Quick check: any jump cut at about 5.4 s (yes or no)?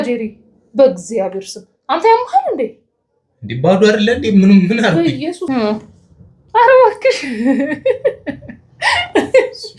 yes